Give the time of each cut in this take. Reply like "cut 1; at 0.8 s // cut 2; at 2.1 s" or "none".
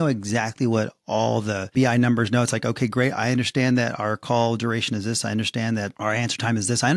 cut 1; at 1.7 s // cut 2; at 5.9 s

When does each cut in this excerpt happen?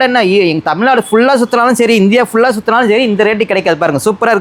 none

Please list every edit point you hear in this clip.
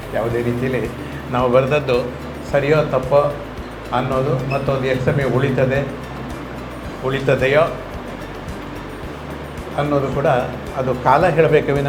none

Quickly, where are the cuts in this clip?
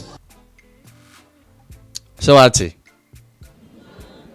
cut 1; at 3.4 s

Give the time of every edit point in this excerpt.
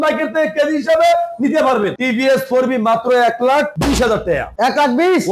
cut 1; at 2.0 s

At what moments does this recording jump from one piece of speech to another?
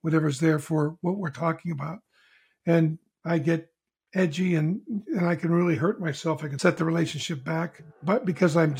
cut 1; at 6.5 s // cut 2; at 7.8 s

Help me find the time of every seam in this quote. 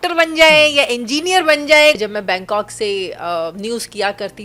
cut 1; at 2.0 s

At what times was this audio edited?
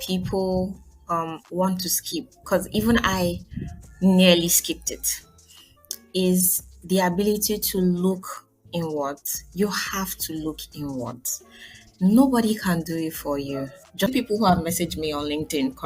cut 1; at 14.1 s

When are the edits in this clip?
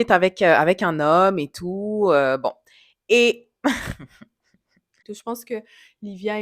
cut 1; at 5.1 s

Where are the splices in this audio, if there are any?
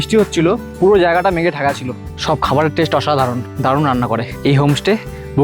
cut 1; at 2.1 s // cut 2; at 3.5 s // cut 3; at 4.3 s

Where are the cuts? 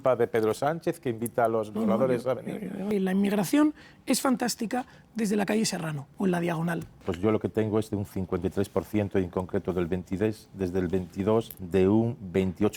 cut 1; at 2.8 s // cut 2; at 6.0 s // cut 3; at 7.1 s // cut 4; at 11.6 s

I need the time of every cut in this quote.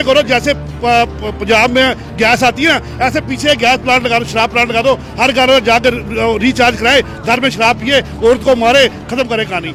none

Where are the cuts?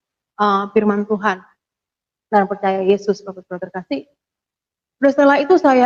none

